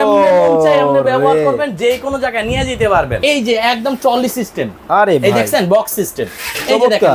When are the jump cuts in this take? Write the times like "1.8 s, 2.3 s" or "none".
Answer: 3.2 s